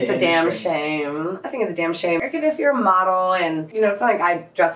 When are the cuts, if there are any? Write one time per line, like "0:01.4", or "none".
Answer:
0:02.2
0:03.7